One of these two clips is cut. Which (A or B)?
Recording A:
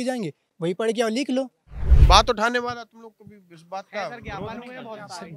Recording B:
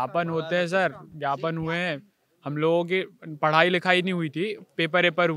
A